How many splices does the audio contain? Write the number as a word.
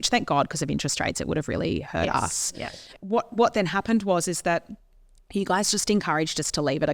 one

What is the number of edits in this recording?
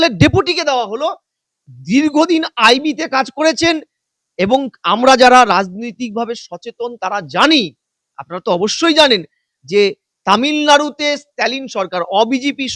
zero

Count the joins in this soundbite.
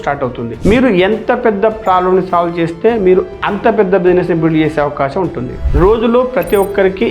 one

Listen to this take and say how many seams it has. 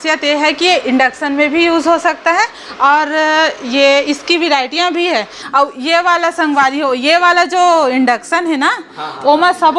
one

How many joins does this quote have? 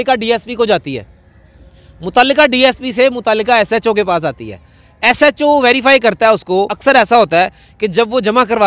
one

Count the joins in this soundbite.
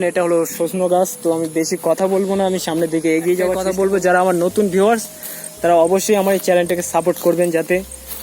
one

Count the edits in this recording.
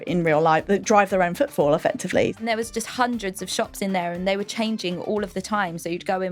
one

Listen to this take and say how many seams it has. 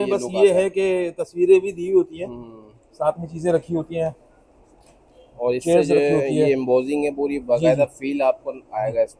zero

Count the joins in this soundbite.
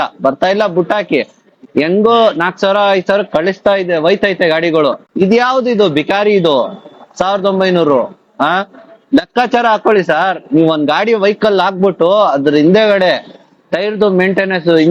one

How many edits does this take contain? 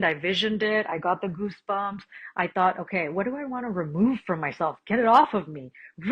zero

